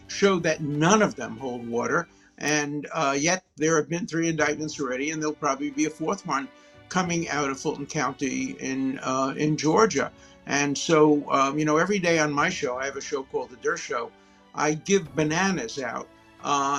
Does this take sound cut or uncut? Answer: uncut